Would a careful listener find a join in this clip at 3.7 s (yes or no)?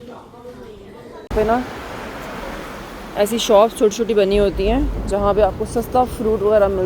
no